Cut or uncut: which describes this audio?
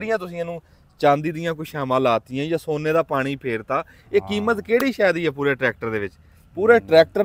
uncut